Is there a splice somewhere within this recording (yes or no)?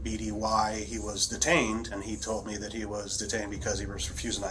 yes